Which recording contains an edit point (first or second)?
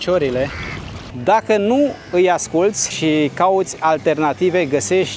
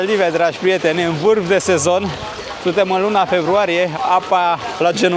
first